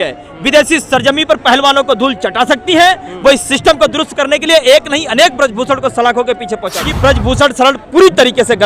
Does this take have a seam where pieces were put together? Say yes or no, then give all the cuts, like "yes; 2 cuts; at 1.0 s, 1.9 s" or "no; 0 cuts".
yes; 1 cut; at 6.8 s